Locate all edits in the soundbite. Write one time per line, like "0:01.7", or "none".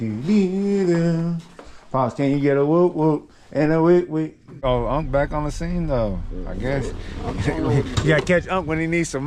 0:04.5